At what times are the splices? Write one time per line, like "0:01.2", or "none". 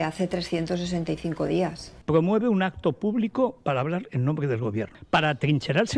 0:01.9
0:05.0